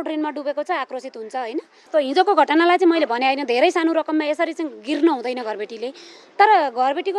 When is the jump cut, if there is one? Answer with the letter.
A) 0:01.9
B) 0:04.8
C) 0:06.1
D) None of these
A